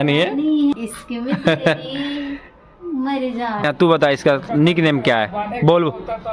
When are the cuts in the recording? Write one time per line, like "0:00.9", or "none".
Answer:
0:00.7
0:03.6